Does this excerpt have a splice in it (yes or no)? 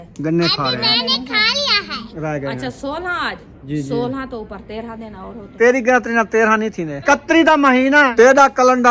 yes